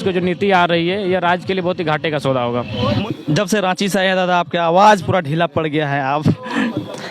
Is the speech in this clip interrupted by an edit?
yes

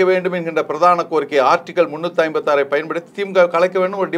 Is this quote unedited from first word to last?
yes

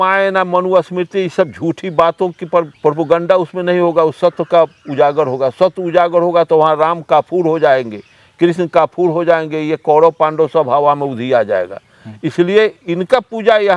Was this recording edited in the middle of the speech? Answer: no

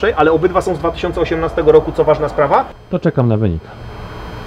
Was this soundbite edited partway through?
no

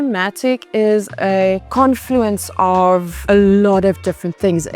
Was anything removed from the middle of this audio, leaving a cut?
yes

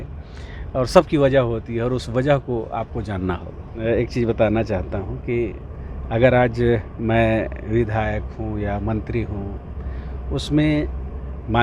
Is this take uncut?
no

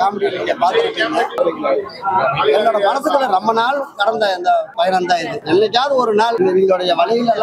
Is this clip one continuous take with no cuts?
no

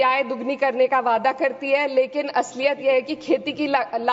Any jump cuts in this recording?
no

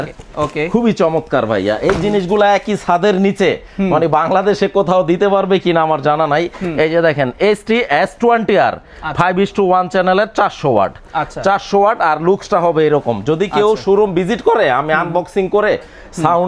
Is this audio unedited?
yes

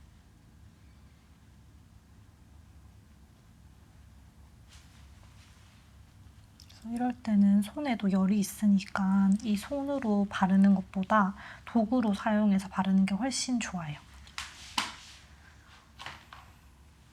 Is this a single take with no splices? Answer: yes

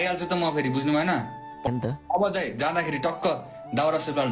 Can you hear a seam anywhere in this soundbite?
yes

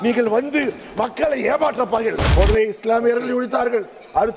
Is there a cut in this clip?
yes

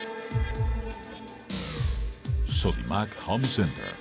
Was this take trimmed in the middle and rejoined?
no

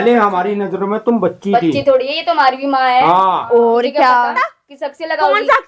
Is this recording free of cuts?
no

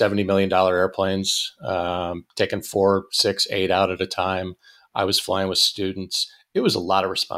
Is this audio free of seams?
yes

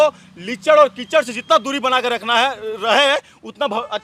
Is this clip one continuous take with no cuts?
yes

